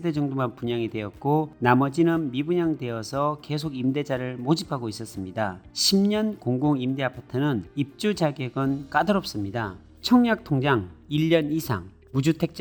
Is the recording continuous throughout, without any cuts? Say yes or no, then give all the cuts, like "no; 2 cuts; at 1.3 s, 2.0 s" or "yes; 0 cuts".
yes; 0 cuts